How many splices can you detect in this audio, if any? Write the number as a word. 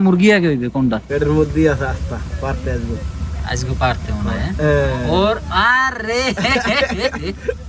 one